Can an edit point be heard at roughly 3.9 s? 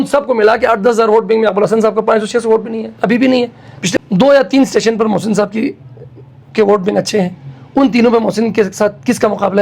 yes; 1 cut; at 3.9 s

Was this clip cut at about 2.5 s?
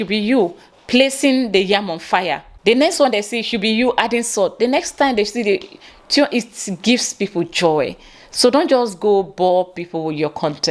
yes; 1 cut; at 2.5 s

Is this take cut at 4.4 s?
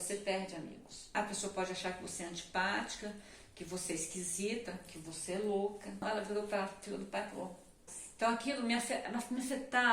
no; 3 cuts; at 1.1 s, 6.0 s, 7.9 s

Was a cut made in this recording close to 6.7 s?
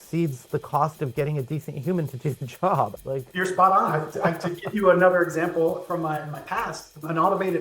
no; 1 cut; at 3.0 s

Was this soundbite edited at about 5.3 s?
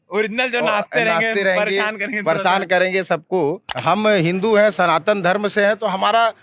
no; 1 cut; at 3.7 s

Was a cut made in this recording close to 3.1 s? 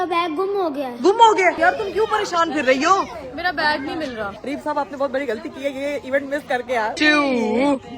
no; 3 cuts; at 1.6 s, 4.3 s, 6.9 s

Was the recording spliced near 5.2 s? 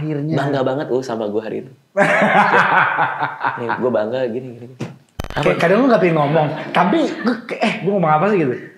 yes; 1 cut; at 5.2 s

